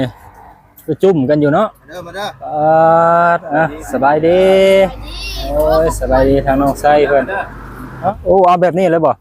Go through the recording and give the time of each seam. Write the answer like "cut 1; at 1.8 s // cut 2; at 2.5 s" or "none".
cut 1; at 7.9 s